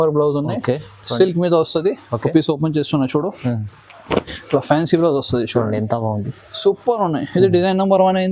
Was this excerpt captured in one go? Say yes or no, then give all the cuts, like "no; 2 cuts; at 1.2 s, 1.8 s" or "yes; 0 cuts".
yes; 0 cuts